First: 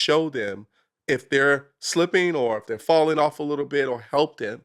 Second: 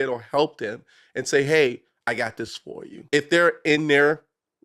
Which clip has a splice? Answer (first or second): second